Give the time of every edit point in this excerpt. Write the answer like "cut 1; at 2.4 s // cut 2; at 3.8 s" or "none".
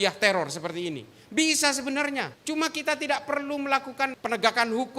cut 1; at 2.3 s // cut 2; at 4.2 s